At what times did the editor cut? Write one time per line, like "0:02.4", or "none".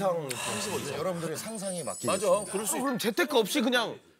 0:00.9
0:02.8